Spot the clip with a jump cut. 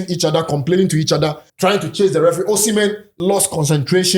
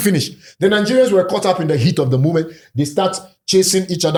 first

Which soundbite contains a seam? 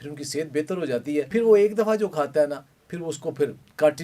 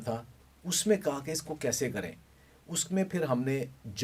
first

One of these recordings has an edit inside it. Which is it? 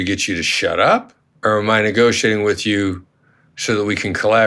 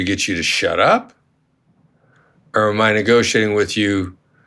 first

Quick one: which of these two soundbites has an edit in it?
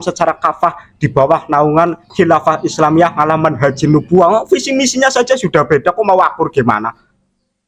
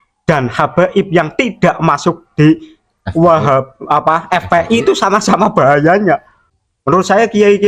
second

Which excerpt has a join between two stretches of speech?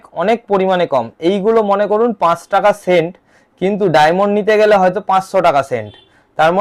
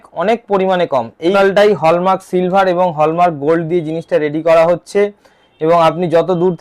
second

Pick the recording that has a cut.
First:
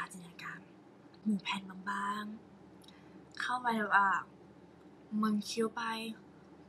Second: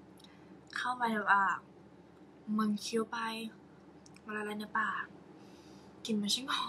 first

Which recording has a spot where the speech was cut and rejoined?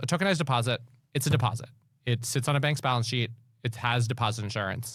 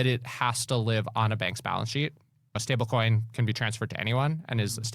second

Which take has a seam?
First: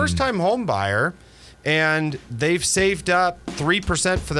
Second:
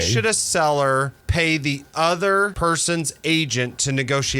second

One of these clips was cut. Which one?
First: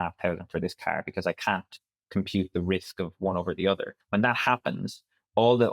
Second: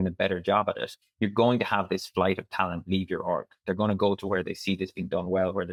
first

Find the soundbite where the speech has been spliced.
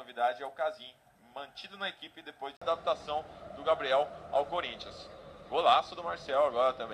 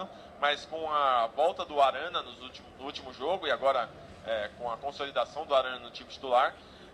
first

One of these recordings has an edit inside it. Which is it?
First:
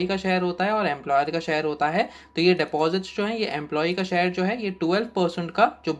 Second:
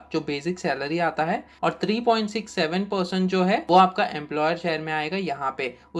second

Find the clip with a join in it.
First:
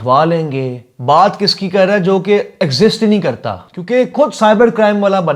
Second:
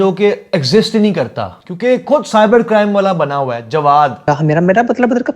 second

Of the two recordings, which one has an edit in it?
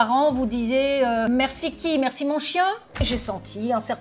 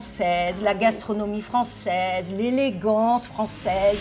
first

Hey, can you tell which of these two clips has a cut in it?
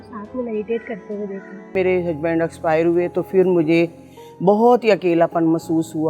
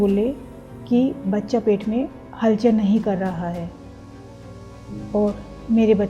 first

